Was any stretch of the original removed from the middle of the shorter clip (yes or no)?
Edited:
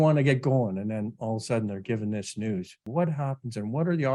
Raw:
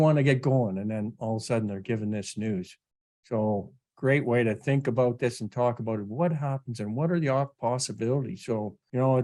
yes